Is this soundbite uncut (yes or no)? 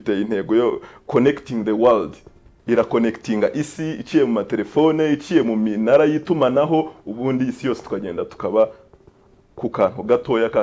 no